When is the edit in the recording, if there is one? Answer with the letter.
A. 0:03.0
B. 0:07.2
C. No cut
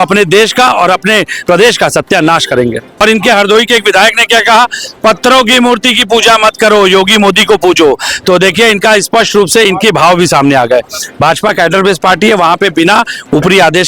A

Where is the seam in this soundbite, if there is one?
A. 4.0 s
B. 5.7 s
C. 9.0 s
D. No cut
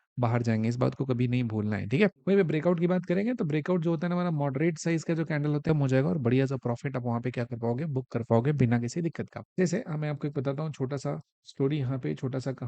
B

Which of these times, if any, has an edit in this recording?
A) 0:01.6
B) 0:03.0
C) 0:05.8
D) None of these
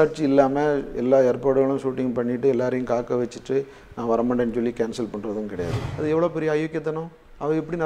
C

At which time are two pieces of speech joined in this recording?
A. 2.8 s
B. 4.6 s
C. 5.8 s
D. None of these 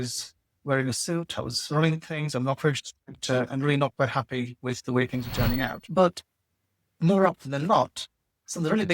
C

